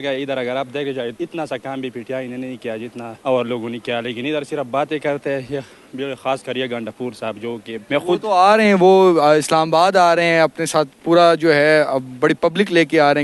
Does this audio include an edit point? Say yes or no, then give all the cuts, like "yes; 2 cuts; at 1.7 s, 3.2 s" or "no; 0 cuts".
yes; 3 cuts; at 1.1 s, 3.1 s, 7.7 s